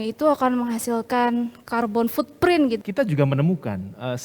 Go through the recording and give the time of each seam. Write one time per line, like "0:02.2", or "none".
0:01.6
0:02.8